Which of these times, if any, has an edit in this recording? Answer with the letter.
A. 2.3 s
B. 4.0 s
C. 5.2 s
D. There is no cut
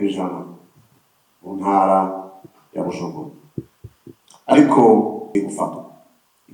C